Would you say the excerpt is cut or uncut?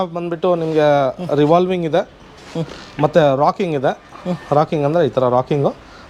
uncut